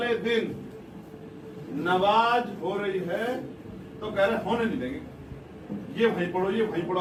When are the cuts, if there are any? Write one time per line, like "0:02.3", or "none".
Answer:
none